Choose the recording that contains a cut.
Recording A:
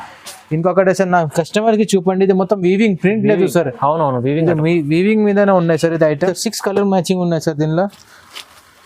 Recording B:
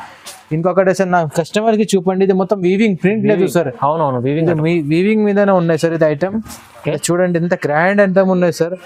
A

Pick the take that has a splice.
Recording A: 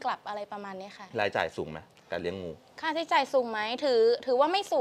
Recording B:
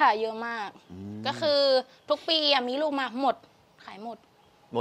A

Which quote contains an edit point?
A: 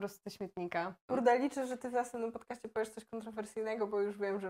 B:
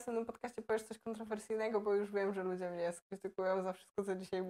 A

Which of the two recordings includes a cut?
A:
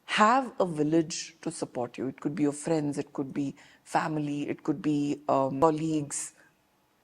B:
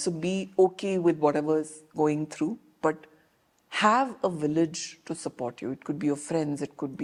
A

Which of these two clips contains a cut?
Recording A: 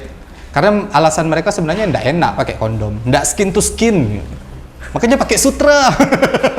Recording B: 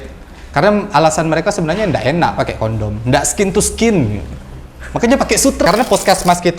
B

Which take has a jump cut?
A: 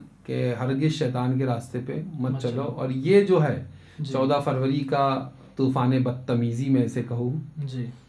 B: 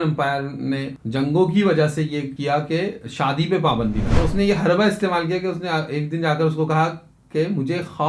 B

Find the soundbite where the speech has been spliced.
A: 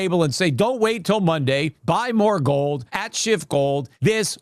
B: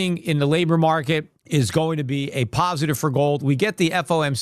A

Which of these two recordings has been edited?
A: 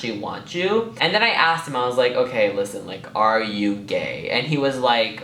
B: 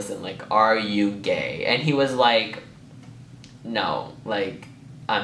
A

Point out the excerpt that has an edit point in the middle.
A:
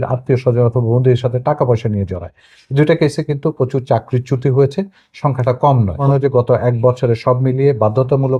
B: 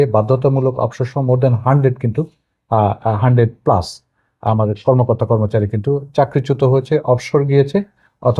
A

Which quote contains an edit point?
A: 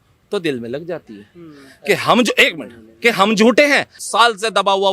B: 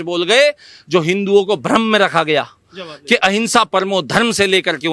A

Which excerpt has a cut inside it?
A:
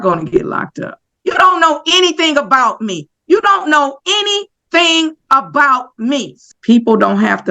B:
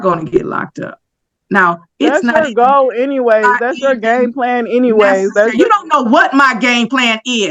A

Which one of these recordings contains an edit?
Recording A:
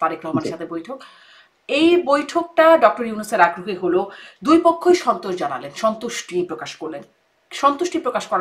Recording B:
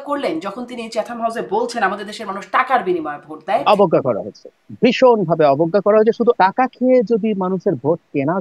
B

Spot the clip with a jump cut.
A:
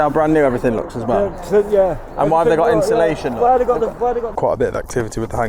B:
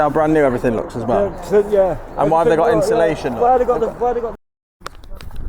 A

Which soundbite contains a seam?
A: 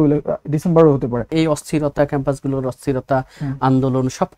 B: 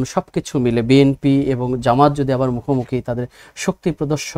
A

